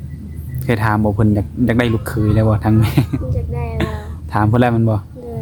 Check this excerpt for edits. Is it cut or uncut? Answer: uncut